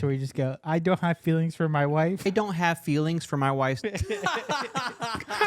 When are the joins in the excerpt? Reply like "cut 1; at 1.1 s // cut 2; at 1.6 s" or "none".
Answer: cut 1; at 2.2 s // cut 2; at 3.8 s